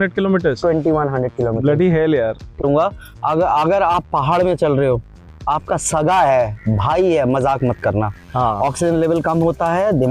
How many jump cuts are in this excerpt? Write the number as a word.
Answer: one